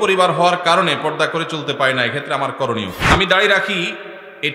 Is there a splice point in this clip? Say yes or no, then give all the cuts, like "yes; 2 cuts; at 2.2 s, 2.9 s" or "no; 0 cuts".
yes; 1 cut; at 3.0 s